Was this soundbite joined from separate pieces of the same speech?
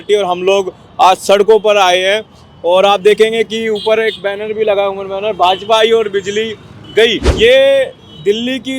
yes; 1 cut; at 7.3 s

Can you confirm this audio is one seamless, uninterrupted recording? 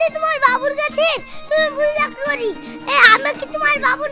yes; 0 cuts

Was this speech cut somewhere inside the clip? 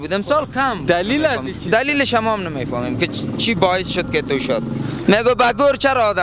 yes; 1 cut; at 4.9 s

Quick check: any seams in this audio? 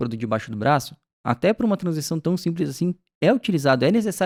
no; 0 cuts

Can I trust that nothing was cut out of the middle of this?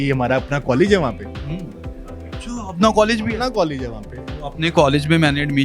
yes; 0 cuts

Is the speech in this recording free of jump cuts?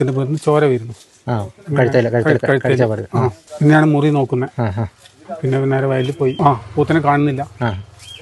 no; 2 cuts; at 3.4 s, 6.4 s

